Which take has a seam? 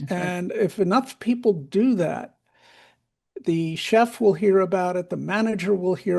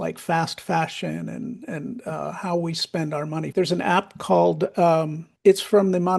second; 2 cuts; at 3.4 s, 5.2 s

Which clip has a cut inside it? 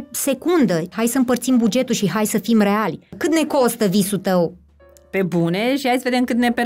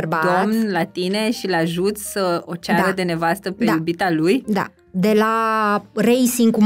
first; 2 cuts; at 0.9 s, 3.2 s

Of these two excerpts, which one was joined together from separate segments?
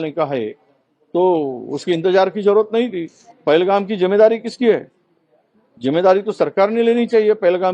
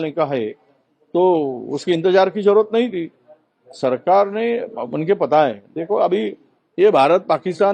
first; 1 cut; at 3.3 s

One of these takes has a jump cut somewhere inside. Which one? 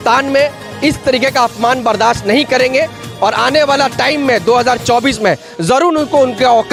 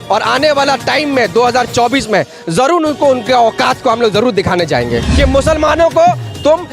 second; 1 cut; at 5.1 s

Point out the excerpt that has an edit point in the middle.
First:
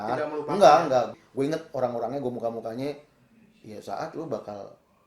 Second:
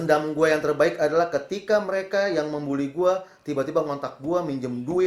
first; 1 cut; at 1.1 s

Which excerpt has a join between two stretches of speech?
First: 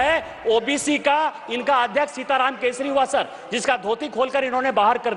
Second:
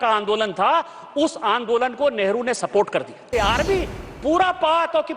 second; 1 cut; at 3.3 s

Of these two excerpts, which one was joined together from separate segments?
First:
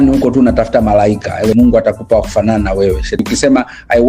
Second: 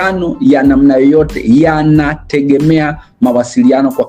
first; 2 cuts; at 1.5 s, 3.2 s

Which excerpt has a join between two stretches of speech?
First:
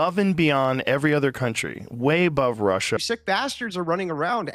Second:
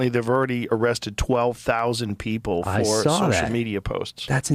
first; 1 cut; at 3.0 s

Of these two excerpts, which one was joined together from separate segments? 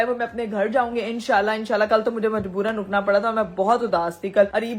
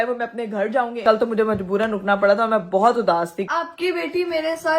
second; 2 cuts; at 1.0 s, 3.4 s

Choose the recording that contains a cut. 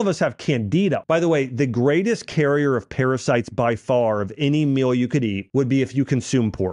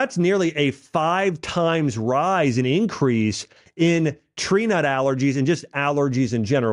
first; 2 cuts; at 1.0 s, 5.4 s

